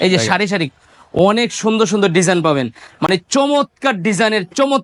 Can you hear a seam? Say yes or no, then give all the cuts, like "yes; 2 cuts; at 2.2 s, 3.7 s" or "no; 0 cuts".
no; 0 cuts